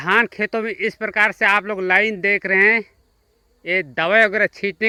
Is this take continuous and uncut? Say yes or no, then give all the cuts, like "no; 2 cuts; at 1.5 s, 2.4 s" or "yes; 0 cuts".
yes; 0 cuts